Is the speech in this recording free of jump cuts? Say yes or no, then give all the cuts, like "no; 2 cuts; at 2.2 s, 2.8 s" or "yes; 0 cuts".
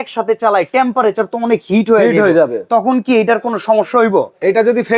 yes; 0 cuts